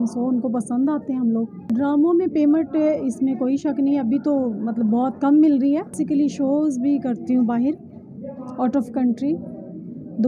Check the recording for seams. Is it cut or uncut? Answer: cut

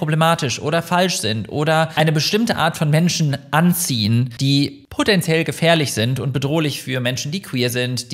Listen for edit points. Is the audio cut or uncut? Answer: cut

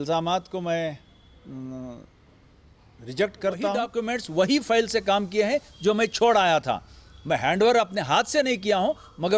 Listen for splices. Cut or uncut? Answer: cut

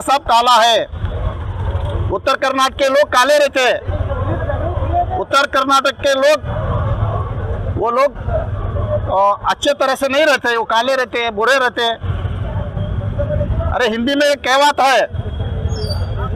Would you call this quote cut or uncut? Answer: uncut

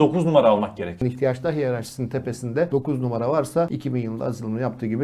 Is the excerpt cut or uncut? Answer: cut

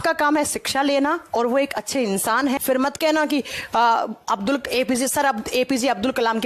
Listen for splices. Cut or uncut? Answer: cut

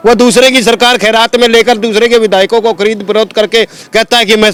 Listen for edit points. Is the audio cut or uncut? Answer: uncut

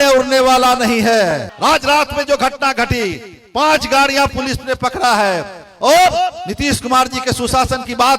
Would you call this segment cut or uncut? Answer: cut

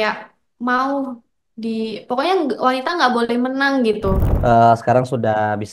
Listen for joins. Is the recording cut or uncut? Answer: cut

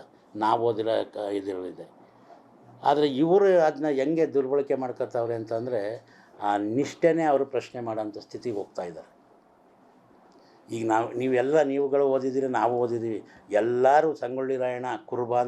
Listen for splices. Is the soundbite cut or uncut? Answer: uncut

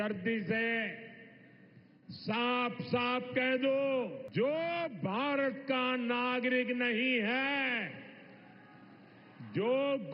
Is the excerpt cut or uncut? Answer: cut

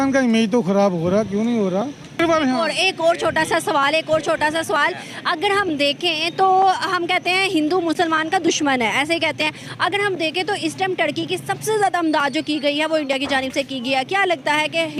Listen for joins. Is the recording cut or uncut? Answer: uncut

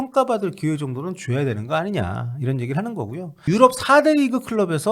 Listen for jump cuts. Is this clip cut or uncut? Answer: cut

